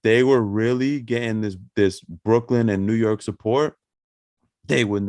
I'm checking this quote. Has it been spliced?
no; 0 cuts

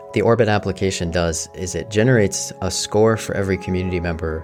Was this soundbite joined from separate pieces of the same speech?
no; 0 cuts

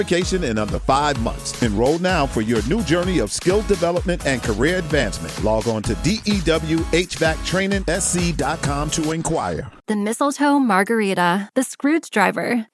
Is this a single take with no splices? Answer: no; 1 cut; at 9.7 s

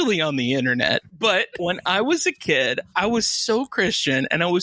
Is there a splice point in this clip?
yes; 2 cuts; at 1.6 s, 2.9 s

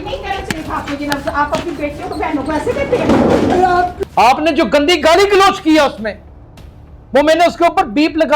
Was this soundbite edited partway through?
yes; 1 cut; at 3.9 s

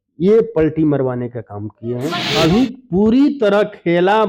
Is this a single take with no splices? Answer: no; 1 cut; at 2.2 s

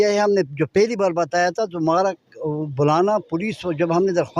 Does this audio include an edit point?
no; 0 cuts

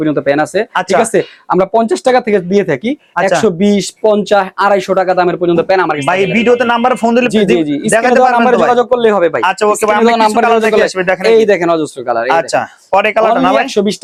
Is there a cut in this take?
no; 0 cuts

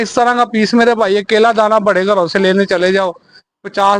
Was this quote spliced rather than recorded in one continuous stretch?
no; 0 cuts

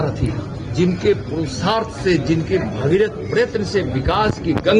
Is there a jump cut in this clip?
no; 0 cuts

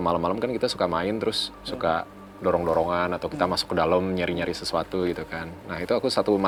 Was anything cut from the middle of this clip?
no; 0 cuts

